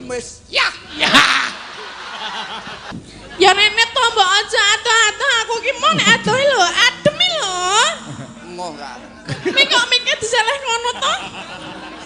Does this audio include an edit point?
yes; 1 cut; at 2.9 s

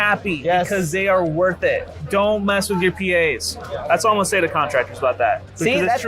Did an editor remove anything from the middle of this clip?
no; 0 cuts

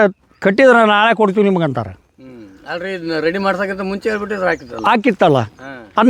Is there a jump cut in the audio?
no; 0 cuts

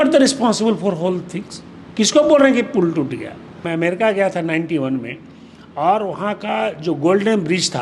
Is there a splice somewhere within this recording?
yes; 1 cut; at 3.6 s

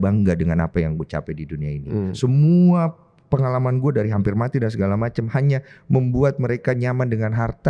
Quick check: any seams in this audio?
no; 0 cuts

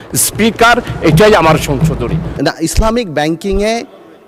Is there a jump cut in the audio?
yes; 1 cut; at 2.2 s

